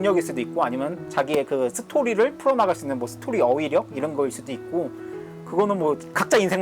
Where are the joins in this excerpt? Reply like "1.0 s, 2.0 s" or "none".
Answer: none